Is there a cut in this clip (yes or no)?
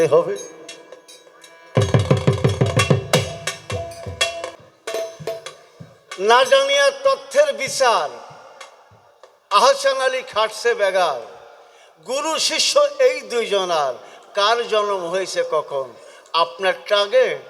yes